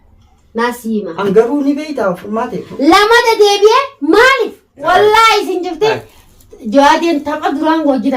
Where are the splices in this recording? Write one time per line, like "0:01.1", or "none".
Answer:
0:04.8